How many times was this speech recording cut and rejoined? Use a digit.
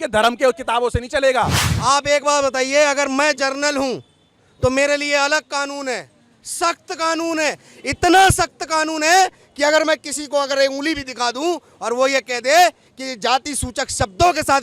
1